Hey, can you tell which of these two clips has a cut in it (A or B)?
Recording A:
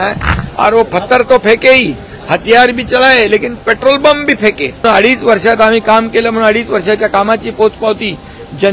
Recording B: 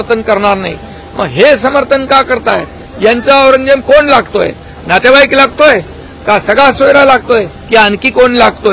A